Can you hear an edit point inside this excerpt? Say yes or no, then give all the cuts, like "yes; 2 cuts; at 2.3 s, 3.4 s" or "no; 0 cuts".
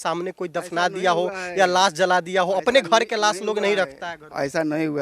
no; 0 cuts